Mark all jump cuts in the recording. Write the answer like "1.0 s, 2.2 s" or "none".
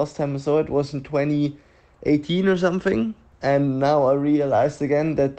3.3 s